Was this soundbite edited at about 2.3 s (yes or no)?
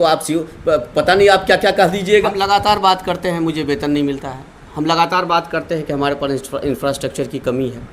yes